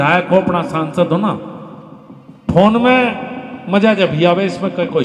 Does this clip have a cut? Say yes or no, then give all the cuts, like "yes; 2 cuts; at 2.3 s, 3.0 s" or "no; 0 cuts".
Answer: no; 0 cuts